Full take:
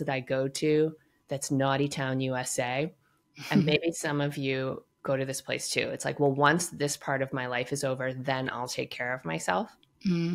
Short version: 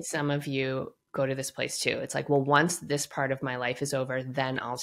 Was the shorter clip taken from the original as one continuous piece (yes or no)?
yes